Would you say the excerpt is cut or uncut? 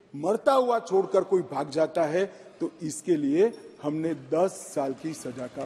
uncut